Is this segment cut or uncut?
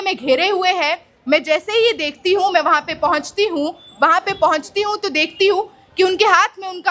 uncut